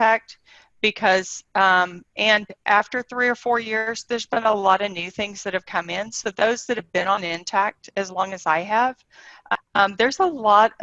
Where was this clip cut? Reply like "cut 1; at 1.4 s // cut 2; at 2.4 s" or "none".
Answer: cut 1; at 9.5 s